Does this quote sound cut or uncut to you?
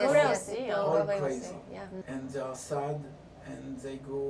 cut